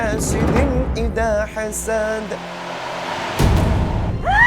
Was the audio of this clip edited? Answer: yes; 1 cut; at 2.6 s

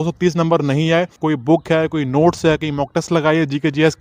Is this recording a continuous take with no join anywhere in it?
no; 1 cut; at 1.2 s

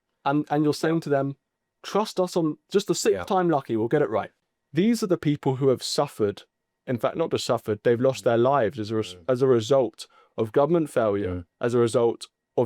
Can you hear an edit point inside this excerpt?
yes; 1 cut; at 4.3 s

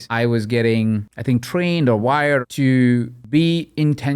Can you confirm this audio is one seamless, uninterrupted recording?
no; 3 cuts; at 1.1 s, 2.4 s, 3.2 s

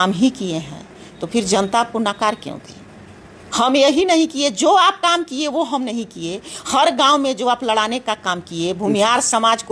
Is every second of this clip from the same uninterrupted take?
yes; 0 cuts

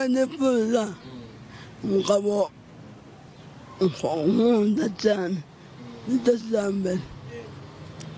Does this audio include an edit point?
no; 0 cuts

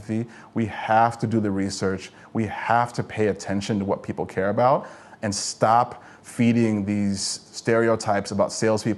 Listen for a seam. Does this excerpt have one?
yes; 1 cut; at 7.5 s

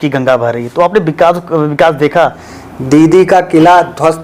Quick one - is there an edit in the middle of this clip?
yes; 1 cut; at 2.4 s

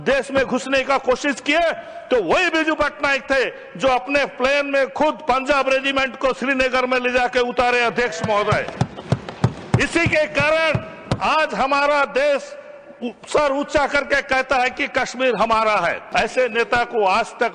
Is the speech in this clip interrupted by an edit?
yes; 1 cut; at 16.0 s

